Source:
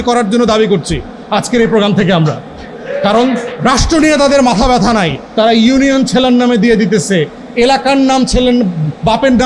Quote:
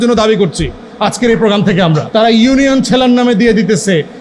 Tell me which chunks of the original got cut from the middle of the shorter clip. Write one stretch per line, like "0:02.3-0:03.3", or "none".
0:02.3-0:05.3